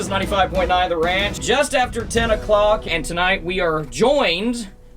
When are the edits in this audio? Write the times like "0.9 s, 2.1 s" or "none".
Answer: 1.3 s, 2.8 s